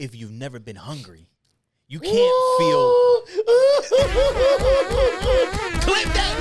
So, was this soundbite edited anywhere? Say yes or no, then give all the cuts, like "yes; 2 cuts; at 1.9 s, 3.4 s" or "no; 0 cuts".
no; 0 cuts